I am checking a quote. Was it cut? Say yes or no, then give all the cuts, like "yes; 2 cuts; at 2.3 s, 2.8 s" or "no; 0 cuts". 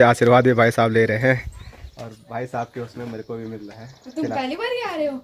no; 0 cuts